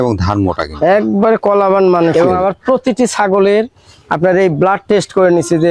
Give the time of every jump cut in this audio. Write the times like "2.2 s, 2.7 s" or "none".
2.1 s